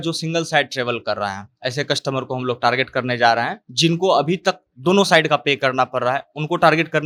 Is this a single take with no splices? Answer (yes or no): yes